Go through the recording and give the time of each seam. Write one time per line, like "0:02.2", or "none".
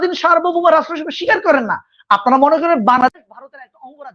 none